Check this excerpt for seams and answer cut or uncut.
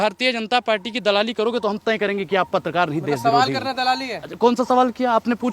uncut